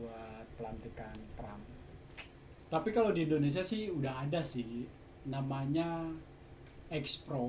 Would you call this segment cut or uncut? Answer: cut